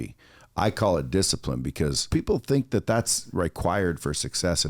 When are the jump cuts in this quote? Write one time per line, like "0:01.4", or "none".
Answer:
0:02.1